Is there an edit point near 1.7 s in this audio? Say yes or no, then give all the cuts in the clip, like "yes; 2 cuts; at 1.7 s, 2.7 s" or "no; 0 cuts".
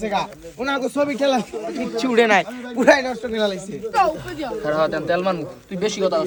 no; 0 cuts